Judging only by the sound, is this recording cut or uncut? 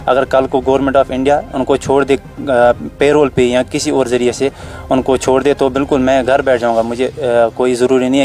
uncut